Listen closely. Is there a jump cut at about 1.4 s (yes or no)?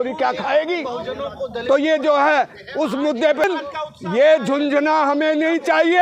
no